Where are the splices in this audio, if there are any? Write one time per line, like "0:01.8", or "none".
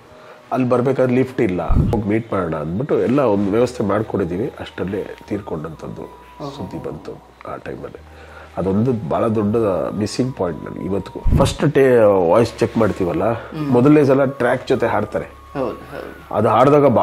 0:01.9
0:11.2

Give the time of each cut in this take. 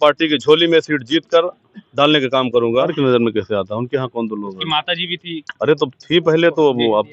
0:02.9

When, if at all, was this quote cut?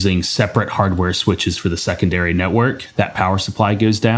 0:02.7

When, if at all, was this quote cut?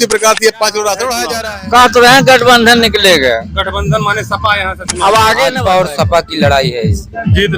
0:01.4
0:05.6

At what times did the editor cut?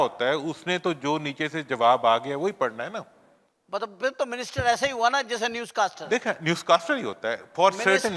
none

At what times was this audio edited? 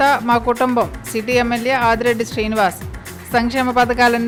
none

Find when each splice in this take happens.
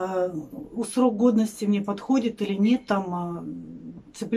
none

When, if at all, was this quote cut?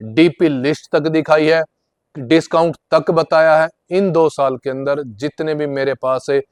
none

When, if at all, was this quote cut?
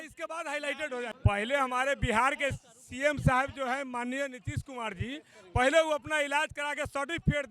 0:01.1

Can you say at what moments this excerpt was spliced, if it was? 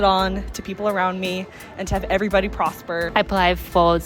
0:03.1

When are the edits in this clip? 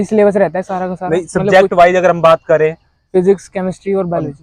none

